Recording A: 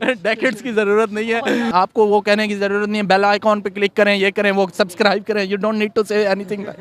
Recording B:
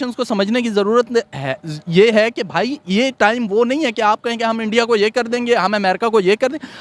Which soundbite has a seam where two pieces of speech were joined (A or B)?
A